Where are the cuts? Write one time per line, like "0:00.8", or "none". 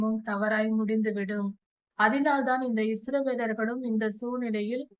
none